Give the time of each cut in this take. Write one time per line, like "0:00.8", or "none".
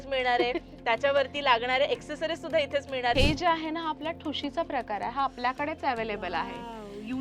0:03.1